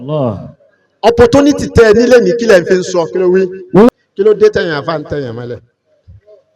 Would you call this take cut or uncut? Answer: cut